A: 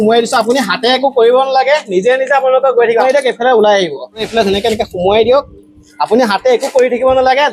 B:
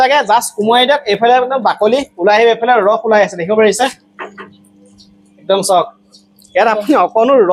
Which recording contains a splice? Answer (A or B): A